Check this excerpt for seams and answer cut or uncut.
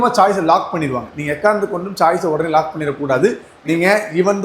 cut